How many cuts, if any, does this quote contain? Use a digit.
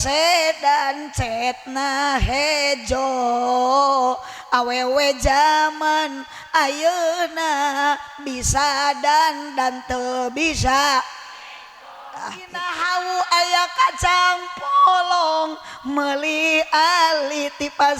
1